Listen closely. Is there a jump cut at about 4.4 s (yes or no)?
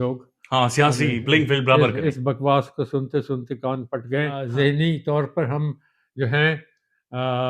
yes